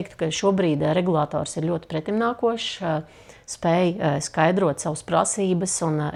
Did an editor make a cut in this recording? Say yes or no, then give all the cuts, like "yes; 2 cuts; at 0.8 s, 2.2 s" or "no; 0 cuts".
no; 0 cuts